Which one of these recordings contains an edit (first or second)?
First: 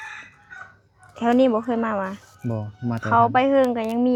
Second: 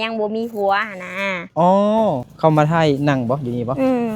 second